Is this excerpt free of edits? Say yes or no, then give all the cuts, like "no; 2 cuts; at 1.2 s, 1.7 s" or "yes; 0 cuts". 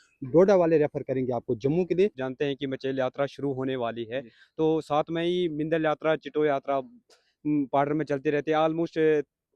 no; 1 cut; at 2.2 s